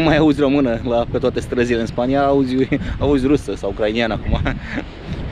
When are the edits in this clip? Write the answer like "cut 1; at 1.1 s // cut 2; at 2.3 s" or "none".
none